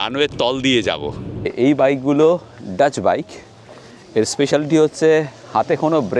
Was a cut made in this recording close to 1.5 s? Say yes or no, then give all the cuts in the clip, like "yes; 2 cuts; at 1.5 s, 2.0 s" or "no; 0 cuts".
yes; 1 cut; at 1.5 s